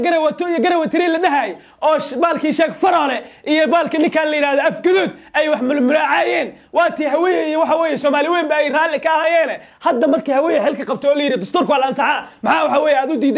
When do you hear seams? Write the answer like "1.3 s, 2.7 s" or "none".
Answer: none